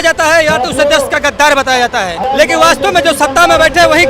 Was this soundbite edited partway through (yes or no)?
yes